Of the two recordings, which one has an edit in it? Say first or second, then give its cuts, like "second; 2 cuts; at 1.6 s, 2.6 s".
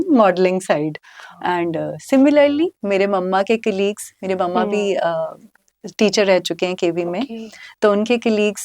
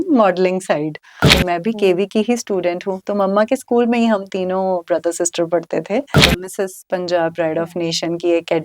second; 2 cuts; at 1.3 s, 6.3 s